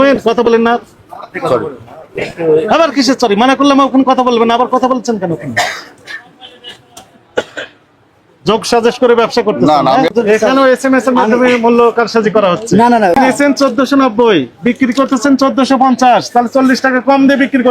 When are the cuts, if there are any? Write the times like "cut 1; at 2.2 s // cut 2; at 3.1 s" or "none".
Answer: cut 1; at 10.1 s // cut 2; at 13.1 s